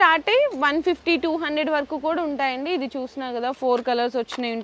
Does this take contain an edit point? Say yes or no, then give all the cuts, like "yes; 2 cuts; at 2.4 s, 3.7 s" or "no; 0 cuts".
no; 0 cuts